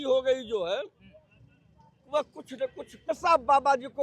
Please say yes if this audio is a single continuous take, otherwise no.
no